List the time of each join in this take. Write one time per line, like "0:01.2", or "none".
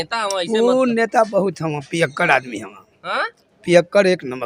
none